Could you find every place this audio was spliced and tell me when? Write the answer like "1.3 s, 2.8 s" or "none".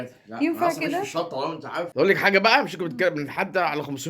1.9 s